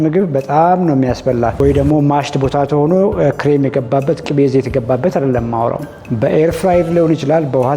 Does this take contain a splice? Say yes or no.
yes